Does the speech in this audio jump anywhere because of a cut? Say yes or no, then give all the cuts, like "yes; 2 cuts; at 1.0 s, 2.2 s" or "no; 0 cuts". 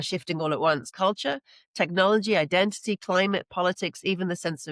yes; 1 cut; at 0.9 s